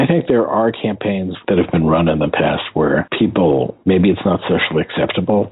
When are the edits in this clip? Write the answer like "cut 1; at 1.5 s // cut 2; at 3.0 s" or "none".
cut 1; at 1.4 s // cut 2; at 3.7 s